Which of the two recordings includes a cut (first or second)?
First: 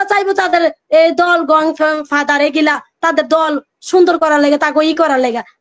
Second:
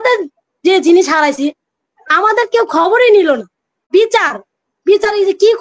second